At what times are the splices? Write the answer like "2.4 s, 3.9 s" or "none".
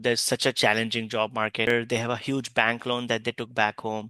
1.7 s